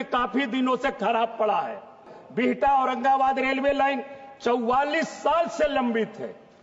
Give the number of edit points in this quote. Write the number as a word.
one